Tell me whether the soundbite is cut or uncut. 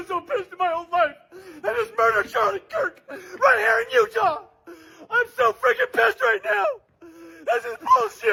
uncut